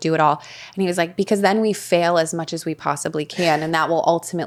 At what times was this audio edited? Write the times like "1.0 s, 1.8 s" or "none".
none